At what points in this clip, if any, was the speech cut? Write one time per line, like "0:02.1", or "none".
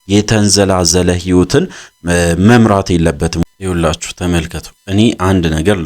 0:03.4